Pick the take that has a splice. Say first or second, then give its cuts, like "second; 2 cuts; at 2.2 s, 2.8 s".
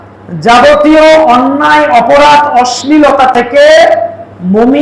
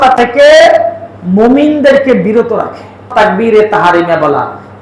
second; 1 cut; at 3.1 s